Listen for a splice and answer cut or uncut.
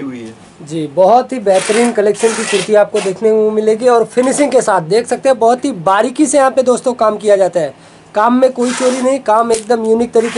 uncut